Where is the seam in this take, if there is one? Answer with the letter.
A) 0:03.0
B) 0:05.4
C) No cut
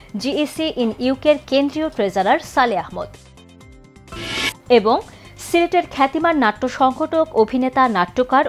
C